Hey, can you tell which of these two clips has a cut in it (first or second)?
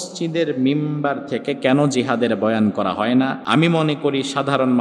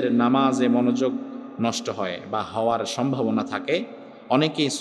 first